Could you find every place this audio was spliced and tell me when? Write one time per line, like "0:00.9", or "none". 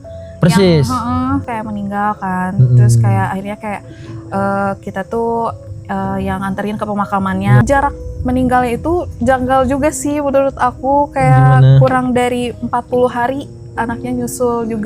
0:01.4
0:07.6